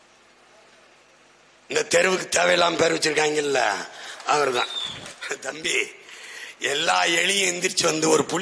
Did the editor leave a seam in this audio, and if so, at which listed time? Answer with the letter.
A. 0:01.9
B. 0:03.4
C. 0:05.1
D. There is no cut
C